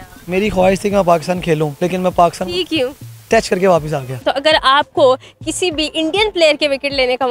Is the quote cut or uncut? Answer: cut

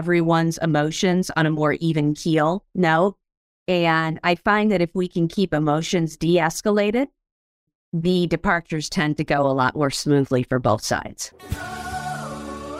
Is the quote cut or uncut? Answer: cut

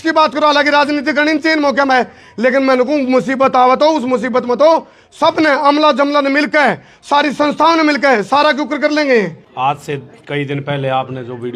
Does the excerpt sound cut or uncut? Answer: cut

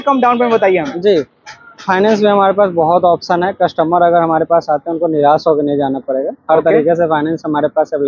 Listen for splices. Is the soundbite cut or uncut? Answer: uncut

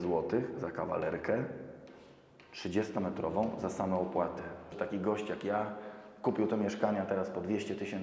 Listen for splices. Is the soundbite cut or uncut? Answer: cut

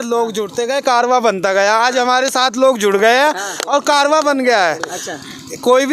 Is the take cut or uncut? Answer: uncut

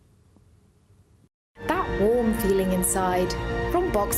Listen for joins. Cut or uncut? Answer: cut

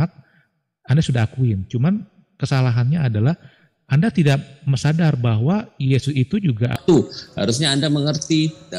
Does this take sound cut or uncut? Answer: cut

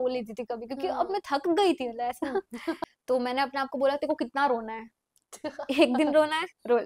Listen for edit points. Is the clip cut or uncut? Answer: cut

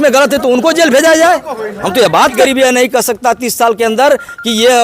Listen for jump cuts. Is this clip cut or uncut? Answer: cut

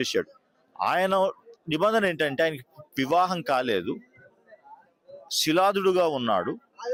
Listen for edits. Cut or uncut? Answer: uncut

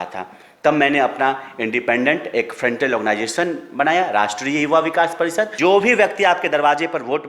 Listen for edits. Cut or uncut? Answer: cut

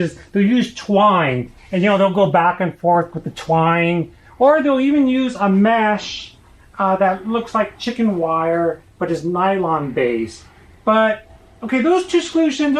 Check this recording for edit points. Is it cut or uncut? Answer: uncut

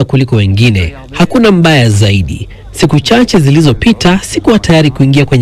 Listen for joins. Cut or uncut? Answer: uncut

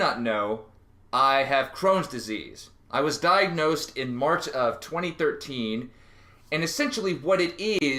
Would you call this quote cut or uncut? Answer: uncut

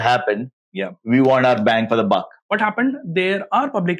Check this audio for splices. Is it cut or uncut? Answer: cut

